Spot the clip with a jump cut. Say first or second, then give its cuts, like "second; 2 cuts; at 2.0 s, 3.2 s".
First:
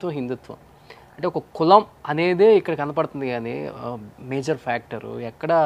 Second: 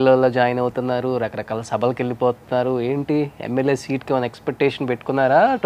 first; 1 cut; at 2.0 s